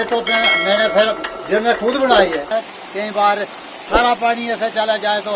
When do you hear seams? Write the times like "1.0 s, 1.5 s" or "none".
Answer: 2.5 s